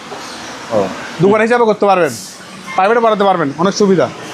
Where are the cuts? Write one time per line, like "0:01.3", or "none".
0:01.0